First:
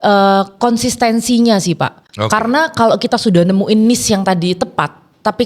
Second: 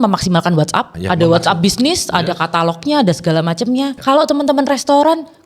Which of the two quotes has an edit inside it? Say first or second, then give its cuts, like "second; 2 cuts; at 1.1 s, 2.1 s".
second; 2 cuts; at 1.0 s, 4.0 s